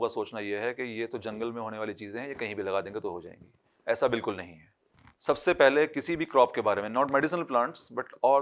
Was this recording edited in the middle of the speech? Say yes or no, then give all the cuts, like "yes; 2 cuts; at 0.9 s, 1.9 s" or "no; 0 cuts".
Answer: no; 0 cuts